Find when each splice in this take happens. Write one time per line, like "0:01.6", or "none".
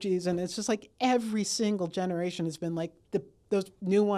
none